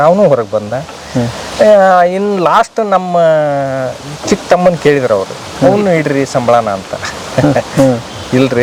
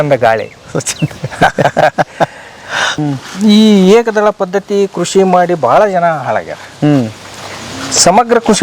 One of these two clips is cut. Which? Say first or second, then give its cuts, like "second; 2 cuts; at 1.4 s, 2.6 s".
second; 1 cut; at 2.9 s